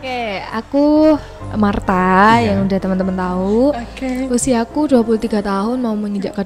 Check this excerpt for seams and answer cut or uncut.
uncut